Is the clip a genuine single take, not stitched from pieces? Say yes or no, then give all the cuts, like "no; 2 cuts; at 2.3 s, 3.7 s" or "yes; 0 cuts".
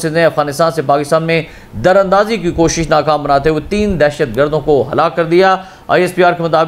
yes; 0 cuts